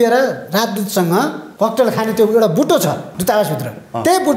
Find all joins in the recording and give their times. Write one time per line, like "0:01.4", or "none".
0:01.4
0:03.1